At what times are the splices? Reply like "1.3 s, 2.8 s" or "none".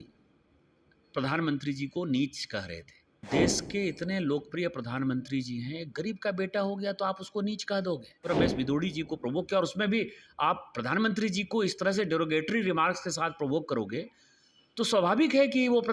3.2 s, 8.3 s